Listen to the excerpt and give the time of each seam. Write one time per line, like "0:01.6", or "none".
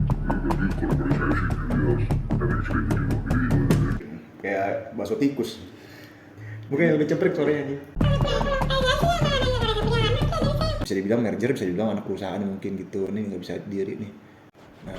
0:10.8